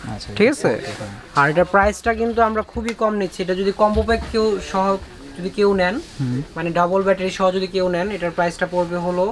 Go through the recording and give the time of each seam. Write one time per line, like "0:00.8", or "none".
none